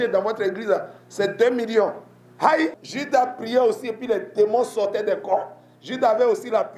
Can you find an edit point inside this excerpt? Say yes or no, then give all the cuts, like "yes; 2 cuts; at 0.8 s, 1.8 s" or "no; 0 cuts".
yes; 1 cut; at 2.9 s